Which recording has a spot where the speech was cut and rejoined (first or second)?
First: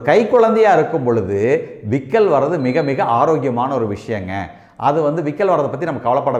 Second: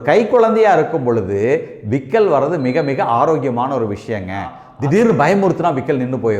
second